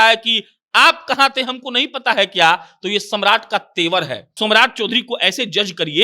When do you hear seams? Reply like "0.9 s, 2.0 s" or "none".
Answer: 4.3 s